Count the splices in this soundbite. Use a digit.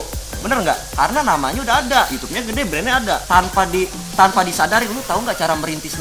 1